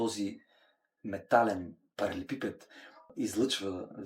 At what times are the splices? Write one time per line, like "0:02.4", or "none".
0:01.8
0:03.1